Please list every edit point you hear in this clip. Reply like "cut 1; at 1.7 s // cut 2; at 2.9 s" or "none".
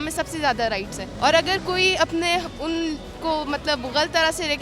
cut 1; at 1.0 s

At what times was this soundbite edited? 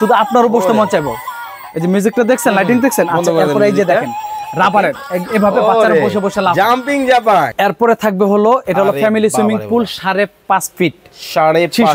cut 1; at 7.5 s

